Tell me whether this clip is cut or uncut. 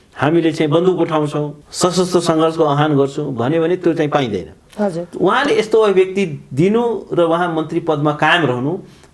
cut